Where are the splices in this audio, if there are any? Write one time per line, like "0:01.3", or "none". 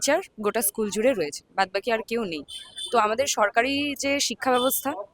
none